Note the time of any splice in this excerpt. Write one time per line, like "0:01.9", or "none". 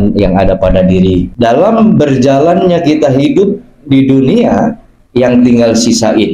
0:01.3